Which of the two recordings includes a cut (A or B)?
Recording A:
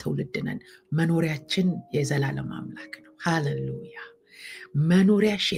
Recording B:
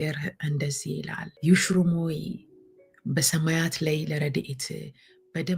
B